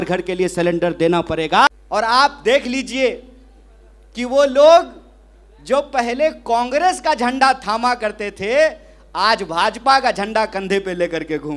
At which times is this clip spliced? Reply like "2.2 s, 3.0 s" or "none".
1.7 s